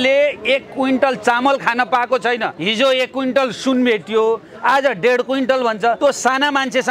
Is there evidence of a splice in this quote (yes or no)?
yes